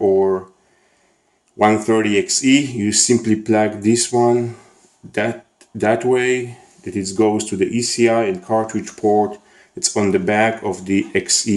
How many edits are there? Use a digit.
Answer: 1